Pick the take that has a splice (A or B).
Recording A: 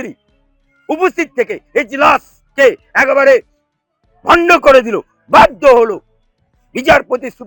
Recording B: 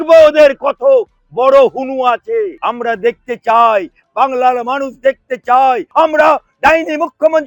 B